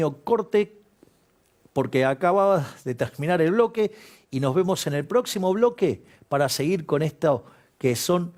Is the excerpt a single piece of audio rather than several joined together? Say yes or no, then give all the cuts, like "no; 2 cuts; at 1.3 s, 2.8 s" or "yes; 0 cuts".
yes; 0 cuts